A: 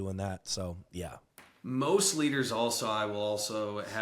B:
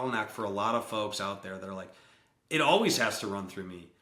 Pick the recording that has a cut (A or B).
A